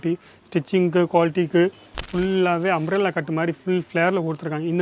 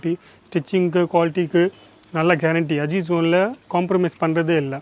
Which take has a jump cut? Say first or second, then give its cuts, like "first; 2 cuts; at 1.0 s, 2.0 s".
first; 1 cut; at 2.0 s